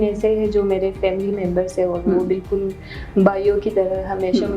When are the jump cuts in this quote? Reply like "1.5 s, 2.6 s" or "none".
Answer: none